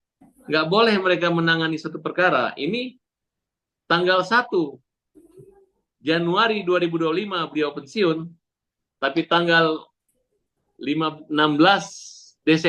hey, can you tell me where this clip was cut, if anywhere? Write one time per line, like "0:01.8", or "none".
none